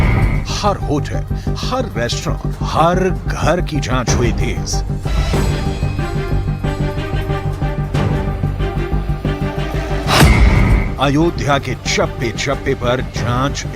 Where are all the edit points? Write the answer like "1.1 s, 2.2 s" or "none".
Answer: 1.0 s